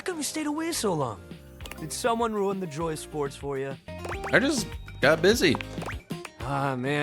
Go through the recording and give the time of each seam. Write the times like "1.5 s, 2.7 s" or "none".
3.9 s, 6.0 s